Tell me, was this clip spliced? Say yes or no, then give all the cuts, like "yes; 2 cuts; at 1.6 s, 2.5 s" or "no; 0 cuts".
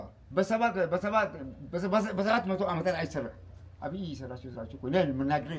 no; 0 cuts